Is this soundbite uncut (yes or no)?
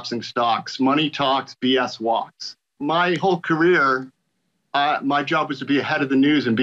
no